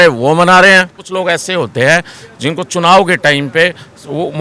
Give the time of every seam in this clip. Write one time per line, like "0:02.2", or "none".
0:01.0